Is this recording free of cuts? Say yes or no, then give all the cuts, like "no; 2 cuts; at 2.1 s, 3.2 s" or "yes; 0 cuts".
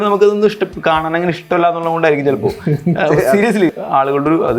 no; 1 cut; at 3.7 s